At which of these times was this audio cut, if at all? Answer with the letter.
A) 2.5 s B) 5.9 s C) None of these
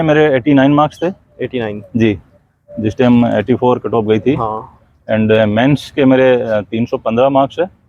C